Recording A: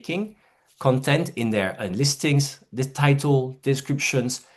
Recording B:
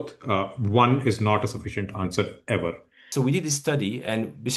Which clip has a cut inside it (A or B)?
B